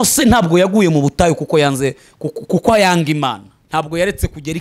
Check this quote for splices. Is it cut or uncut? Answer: cut